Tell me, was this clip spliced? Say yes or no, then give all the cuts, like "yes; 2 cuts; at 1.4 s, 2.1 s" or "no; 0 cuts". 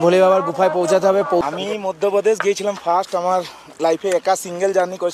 yes; 1 cut; at 1.4 s